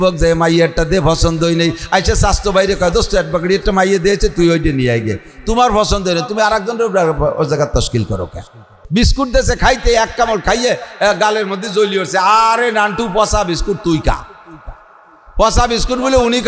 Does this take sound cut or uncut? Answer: cut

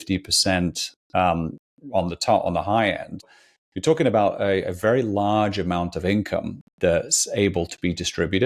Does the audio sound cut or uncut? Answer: cut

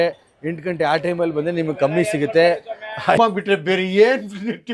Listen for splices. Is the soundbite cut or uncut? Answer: cut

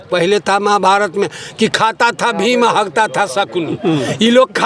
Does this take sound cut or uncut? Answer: uncut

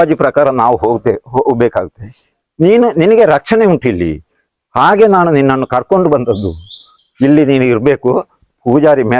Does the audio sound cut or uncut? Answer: uncut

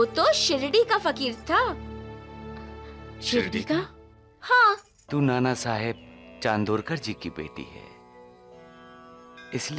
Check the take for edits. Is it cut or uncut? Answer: cut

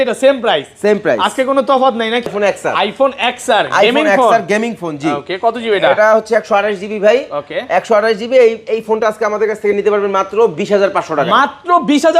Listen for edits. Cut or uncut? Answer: cut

